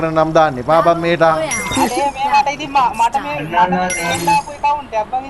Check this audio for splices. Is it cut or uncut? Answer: uncut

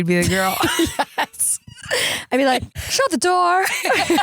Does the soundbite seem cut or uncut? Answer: cut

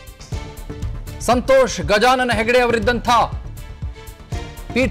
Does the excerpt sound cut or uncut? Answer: cut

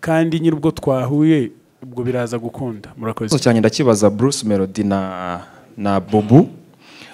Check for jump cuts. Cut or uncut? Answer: cut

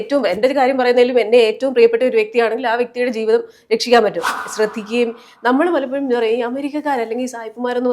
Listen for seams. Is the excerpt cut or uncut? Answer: cut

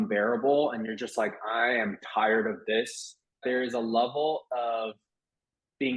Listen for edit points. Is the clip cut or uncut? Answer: cut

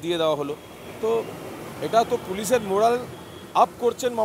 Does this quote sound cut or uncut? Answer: uncut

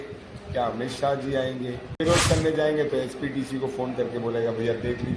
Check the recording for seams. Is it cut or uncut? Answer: cut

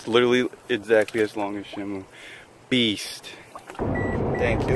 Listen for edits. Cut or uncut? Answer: cut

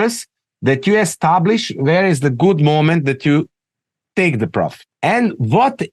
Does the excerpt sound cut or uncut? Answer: cut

